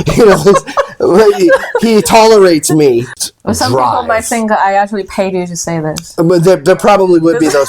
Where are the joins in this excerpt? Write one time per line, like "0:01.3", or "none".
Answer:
0:03.1